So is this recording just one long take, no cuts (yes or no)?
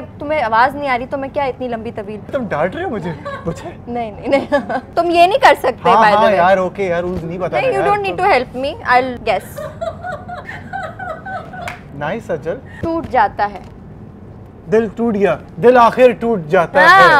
no